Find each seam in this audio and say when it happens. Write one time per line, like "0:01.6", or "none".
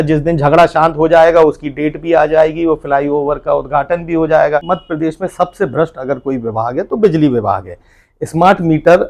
0:04.7